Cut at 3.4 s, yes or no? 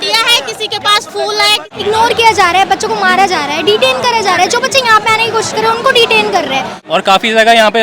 no